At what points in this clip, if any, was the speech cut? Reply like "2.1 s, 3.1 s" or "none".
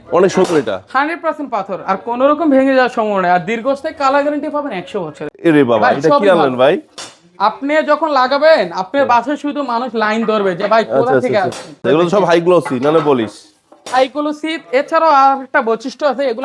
5.2 s, 11.8 s

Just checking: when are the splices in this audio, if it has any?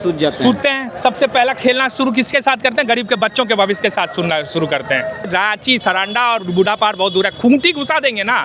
5.3 s

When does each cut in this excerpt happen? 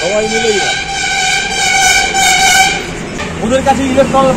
3.2 s

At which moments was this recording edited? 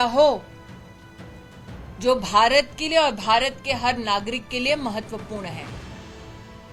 none

